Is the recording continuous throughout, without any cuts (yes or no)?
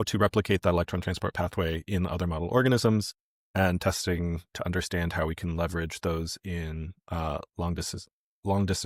yes